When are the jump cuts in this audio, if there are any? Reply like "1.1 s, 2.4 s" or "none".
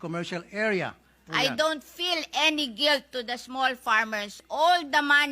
1.2 s